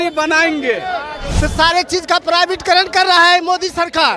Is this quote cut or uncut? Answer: cut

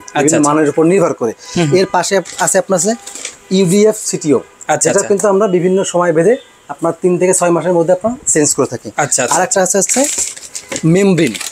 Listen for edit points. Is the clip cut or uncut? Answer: uncut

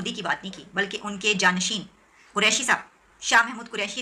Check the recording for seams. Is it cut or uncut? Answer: uncut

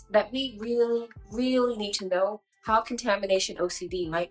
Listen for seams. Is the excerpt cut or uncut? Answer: uncut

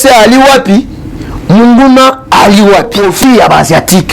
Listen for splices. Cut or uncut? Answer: cut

